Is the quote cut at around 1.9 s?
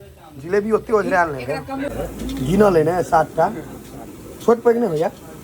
yes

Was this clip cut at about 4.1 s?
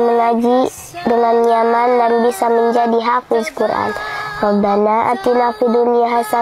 no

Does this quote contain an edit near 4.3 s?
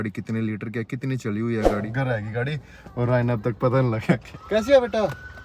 yes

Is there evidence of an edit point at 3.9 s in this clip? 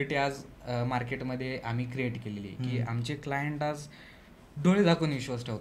no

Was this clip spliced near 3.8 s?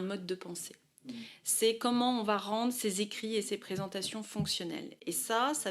no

